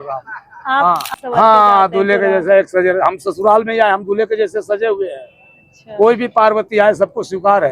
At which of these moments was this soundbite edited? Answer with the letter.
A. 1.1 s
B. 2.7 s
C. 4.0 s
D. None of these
A